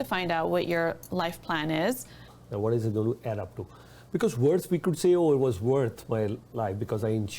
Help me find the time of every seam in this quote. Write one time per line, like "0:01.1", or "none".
0:02.4